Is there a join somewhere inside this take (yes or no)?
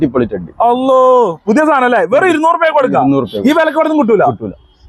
no